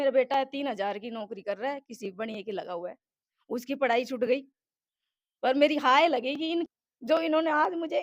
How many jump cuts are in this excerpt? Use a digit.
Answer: 1